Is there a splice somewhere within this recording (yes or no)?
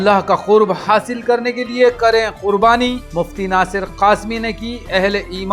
no